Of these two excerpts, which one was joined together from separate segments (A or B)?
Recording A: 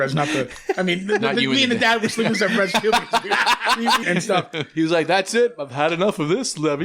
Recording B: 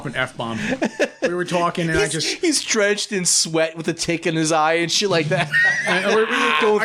A